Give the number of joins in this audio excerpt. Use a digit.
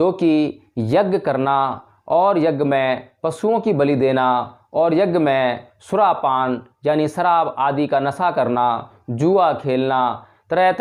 0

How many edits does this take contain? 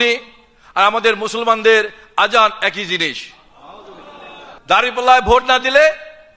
1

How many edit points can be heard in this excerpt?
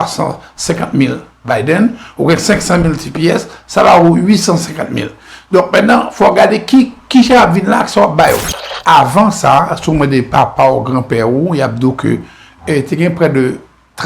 1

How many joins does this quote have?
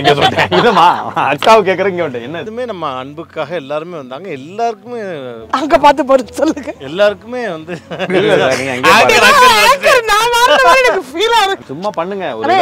2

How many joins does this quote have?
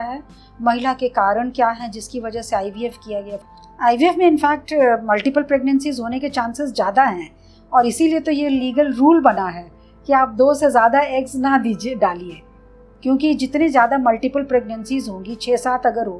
1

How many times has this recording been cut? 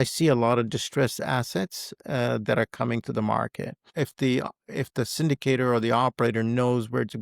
1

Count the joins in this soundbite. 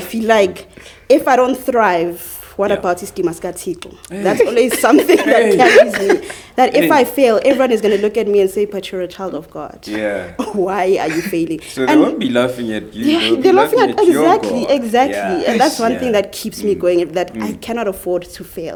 0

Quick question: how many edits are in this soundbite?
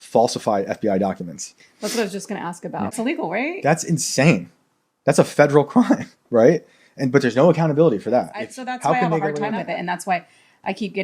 2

